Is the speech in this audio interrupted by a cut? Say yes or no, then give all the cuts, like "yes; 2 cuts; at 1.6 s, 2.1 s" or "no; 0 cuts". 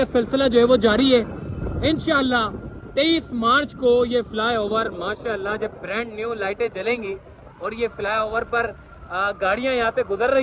no; 0 cuts